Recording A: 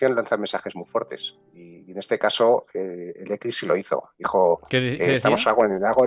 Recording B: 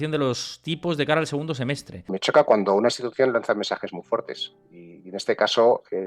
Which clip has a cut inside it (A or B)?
B